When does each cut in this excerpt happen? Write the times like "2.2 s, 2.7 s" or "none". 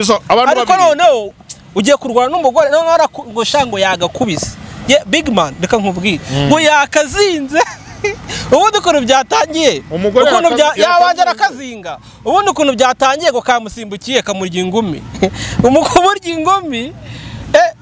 1.3 s